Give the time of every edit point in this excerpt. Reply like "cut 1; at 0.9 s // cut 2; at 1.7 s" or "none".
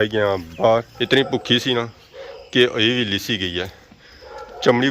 cut 1; at 0.9 s